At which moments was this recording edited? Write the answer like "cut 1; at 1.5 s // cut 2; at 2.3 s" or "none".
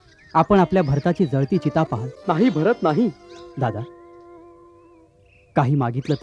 cut 1; at 3.3 s